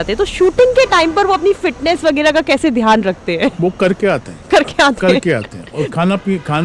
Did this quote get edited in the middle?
no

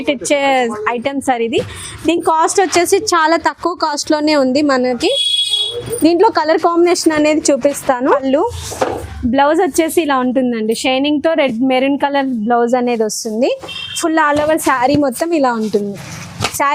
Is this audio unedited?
no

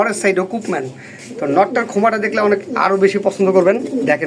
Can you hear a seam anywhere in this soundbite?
no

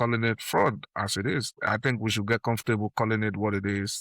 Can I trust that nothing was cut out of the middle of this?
no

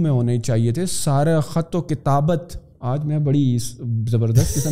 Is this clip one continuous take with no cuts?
yes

